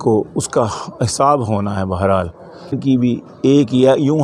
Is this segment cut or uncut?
cut